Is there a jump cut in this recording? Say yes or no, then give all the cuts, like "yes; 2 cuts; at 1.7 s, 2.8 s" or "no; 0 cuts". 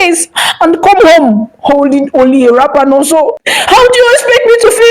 yes; 1 cut; at 3.5 s